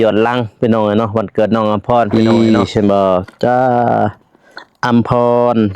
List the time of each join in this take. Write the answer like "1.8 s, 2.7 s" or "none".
2.1 s

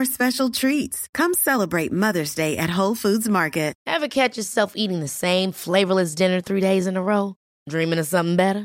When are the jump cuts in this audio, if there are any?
3.8 s

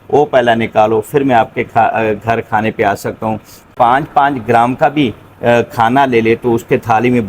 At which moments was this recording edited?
3.7 s

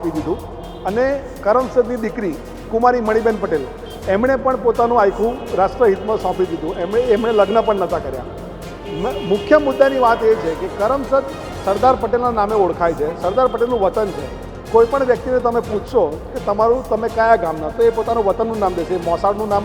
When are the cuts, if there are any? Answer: none

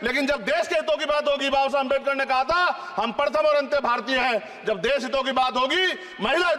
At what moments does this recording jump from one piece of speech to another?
none

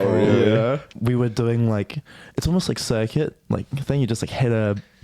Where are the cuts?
0.9 s

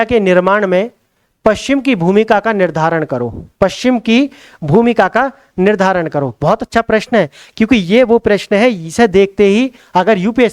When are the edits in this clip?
none

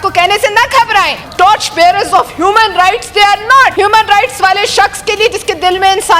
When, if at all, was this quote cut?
1.3 s, 3.7 s

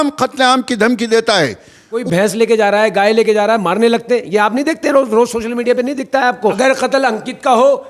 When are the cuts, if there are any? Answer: 2.0 s, 6.6 s

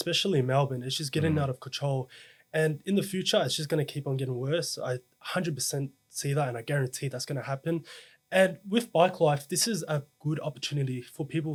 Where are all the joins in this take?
none

